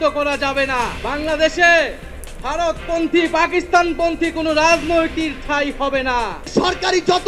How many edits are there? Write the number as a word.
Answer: two